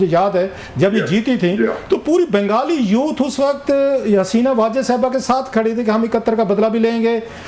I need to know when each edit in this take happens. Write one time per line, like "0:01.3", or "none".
none